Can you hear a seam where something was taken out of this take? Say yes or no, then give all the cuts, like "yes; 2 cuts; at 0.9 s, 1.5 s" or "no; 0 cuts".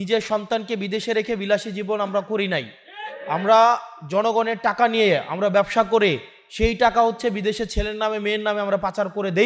no; 0 cuts